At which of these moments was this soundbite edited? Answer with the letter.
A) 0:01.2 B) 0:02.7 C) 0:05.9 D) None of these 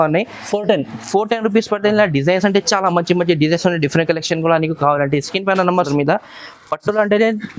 C